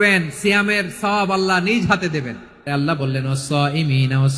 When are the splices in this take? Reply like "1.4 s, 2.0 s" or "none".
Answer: 2.7 s